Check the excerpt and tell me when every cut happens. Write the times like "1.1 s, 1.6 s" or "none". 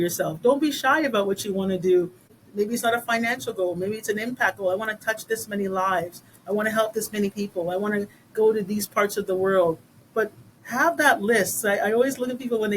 2.4 s